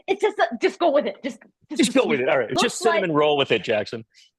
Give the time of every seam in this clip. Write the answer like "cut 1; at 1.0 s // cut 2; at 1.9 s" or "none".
cut 1; at 2.5 s